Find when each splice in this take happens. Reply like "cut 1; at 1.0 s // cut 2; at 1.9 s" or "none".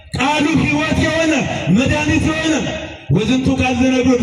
none